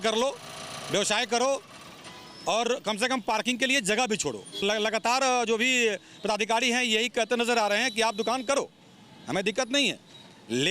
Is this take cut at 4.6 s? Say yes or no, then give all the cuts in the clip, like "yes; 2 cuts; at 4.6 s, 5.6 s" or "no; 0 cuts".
yes; 1 cut; at 4.6 s